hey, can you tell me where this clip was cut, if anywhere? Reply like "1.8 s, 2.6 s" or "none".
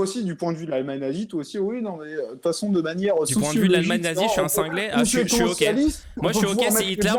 none